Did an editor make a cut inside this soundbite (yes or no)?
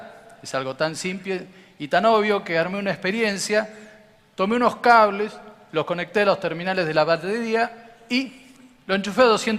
yes